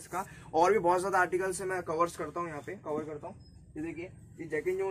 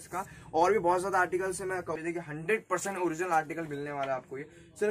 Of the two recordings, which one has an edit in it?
second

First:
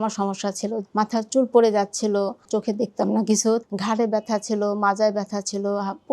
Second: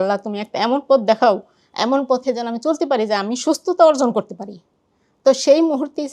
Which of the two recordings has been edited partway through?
first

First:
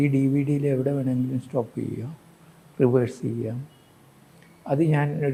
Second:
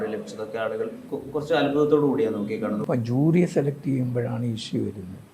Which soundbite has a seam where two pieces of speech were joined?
second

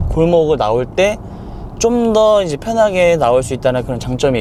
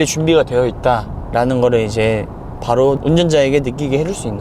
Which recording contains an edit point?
second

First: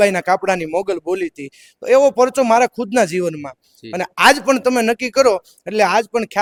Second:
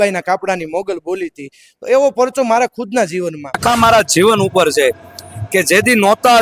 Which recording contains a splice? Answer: second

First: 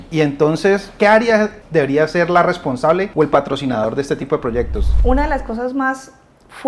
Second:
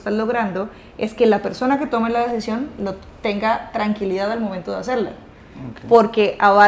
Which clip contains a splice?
first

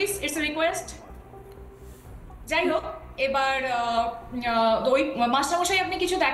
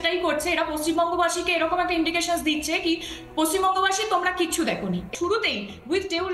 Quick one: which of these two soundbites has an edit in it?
second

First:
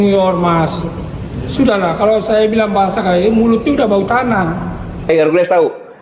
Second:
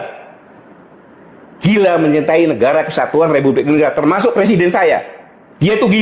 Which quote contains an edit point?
first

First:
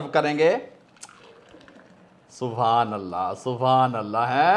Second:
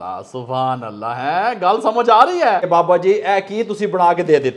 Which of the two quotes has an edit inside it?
second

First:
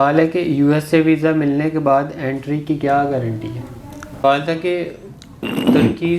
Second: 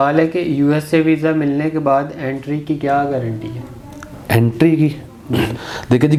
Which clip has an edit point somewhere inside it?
first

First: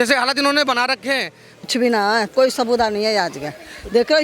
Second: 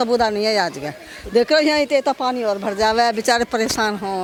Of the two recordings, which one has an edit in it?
first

